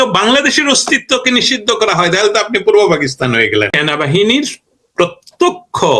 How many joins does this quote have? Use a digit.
1